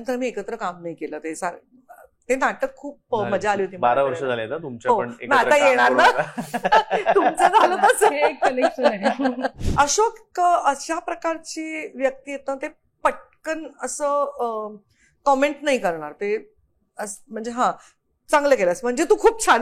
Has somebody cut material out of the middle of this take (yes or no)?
yes